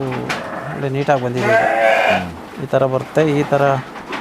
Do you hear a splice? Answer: no; 0 cuts

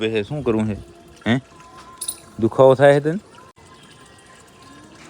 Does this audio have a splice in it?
yes; 1 cut; at 3.6 s

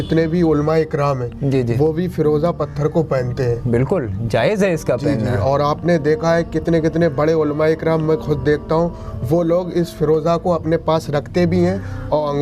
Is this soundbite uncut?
yes; 0 cuts

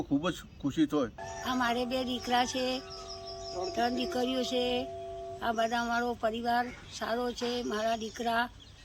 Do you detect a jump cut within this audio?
yes; 1 cut; at 1.3 s

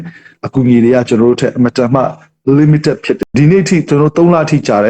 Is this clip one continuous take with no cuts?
no; 1 cut; at 3.2 s

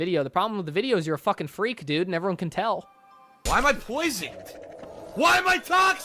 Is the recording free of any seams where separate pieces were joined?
no; 1 cut; at 3.3 s

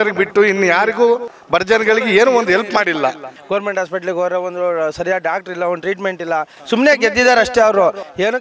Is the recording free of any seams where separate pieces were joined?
no; 1 cut; at 3.3 s

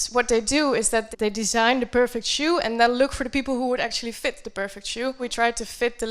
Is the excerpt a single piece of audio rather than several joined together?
no; 2 cuts; at 1.1 s, 5.3 s

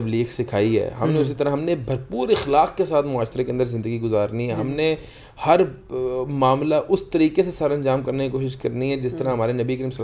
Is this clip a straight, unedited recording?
yes; 0 cuts

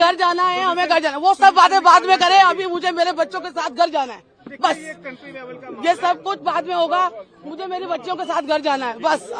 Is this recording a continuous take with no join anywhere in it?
yes; 0 cuts

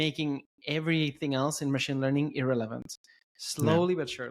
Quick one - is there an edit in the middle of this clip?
no; 0 cuts

